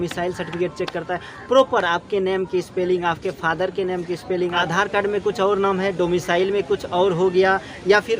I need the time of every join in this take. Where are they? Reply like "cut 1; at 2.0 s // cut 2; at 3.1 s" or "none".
cut 1; at 4.6 s